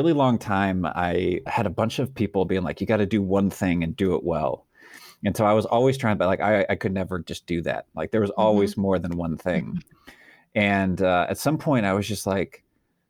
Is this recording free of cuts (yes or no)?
yes